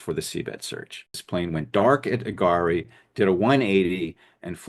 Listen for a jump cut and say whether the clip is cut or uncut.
cut